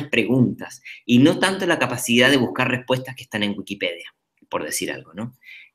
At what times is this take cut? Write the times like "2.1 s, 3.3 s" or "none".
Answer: 3.2 s